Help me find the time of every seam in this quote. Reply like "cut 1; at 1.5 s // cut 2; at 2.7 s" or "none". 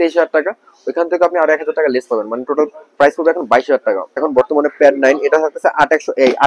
cut 1; at 4.3 s